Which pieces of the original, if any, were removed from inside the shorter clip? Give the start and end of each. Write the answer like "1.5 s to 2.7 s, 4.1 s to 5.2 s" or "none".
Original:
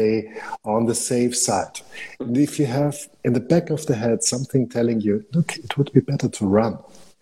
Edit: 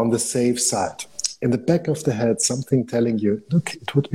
2.0 s to 3.1 s